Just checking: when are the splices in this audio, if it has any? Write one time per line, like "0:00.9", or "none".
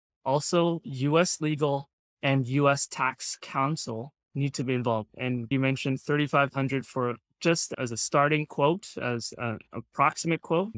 0:05.5
0:07.7